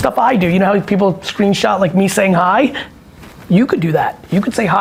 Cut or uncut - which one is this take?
uncut